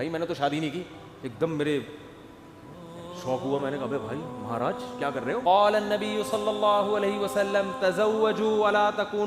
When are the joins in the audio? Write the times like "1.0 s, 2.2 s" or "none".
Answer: 5.4 s